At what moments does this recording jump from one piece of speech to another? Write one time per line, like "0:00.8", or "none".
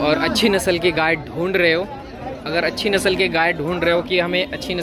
none